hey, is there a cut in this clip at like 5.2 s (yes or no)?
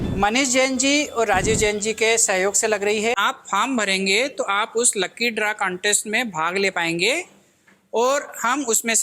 no